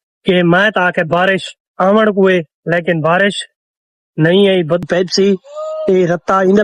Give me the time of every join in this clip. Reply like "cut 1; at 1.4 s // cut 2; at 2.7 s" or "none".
cut 1; at 4.8 s